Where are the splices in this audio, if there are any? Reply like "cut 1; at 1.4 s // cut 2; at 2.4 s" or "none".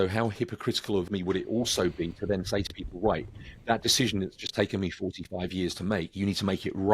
cut 1; at 1.1 s

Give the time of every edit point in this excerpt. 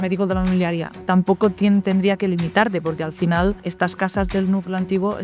cut 1; at 0.9 s // cut 2; at 3.7 s

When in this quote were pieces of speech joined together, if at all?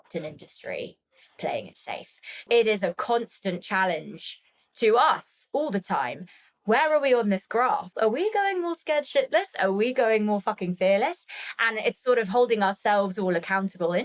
cut 1; at 2.4 s // cut 2; at 7.9 s

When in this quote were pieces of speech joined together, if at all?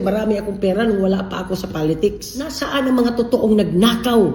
cut 1; at 2.4 s

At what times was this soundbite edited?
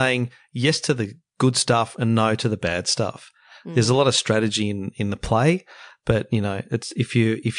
none

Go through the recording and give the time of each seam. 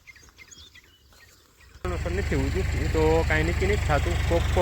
cut 1; at 1.8 s

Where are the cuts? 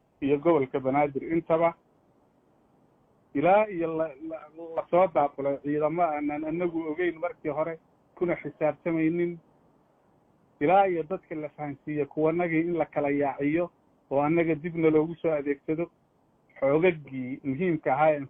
none

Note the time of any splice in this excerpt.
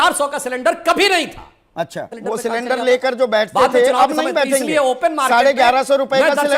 cut 1; at 2.1 s // cut 2; at 5.0 s

